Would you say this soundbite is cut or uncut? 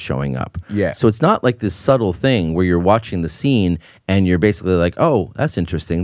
uncut